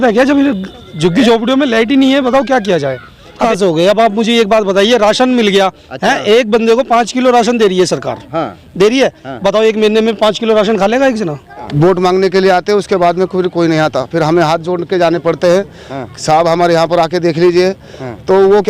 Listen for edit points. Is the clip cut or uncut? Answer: cut